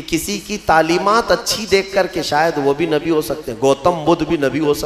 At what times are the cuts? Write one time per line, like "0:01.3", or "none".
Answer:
none